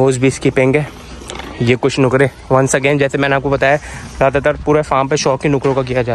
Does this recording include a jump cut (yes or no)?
no